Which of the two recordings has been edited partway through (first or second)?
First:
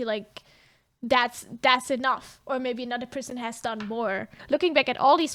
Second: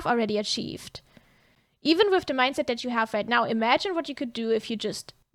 first